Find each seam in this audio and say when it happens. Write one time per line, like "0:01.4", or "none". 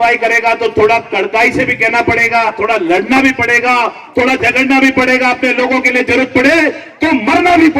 0:02.6